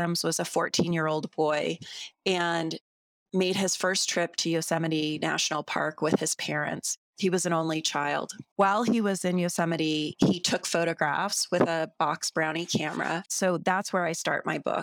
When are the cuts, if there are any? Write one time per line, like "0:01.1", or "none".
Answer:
0:13.3